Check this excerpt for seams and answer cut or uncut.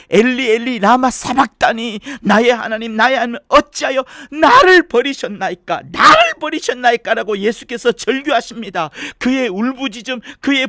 uncut